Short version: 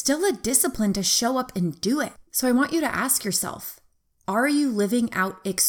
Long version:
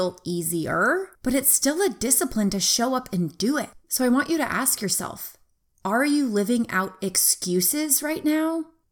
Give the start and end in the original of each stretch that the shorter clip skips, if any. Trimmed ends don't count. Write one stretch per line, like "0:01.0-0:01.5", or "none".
none